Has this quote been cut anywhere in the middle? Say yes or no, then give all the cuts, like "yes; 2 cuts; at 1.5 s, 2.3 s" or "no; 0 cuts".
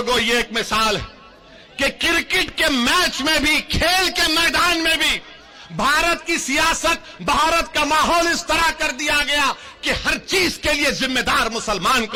no; 0 cuts